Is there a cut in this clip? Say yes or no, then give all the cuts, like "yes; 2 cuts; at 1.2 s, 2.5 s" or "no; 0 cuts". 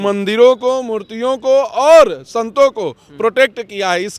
no; 0 cuts